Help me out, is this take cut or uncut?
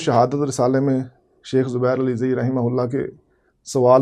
uncut